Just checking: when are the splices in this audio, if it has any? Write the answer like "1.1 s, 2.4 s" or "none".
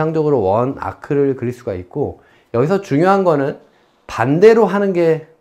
none